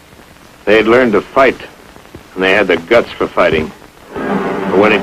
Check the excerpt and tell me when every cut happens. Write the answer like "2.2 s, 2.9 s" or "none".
3.7 s